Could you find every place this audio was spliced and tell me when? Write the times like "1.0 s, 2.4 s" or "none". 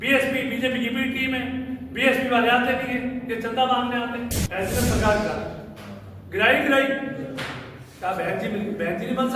4.4 s